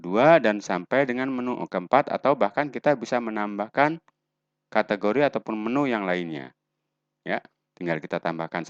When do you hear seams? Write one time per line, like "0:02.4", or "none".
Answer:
none